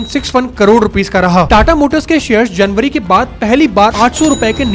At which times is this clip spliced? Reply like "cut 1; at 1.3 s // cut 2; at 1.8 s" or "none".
cut 1; at 1.5 s